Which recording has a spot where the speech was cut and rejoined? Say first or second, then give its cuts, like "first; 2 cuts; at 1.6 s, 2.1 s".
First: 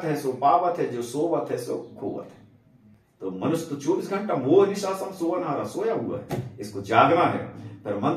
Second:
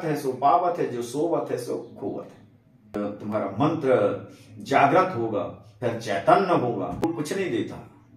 second; 2 cuts; at 3.0 s, 7.0 s